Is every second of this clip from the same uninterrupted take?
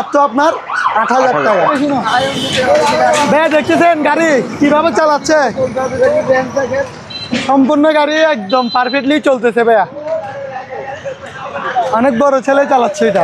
no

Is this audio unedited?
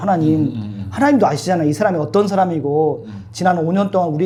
yes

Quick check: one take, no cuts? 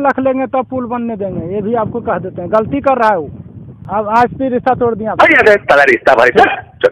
no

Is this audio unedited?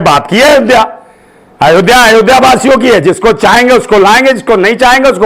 yes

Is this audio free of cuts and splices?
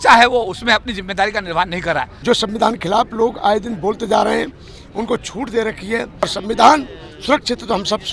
no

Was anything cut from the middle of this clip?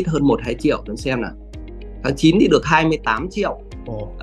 no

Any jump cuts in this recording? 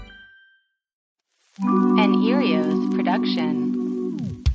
yes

